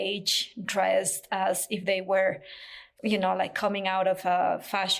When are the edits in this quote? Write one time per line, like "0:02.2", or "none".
none